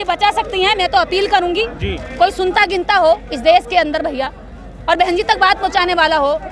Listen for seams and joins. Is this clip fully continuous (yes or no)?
yes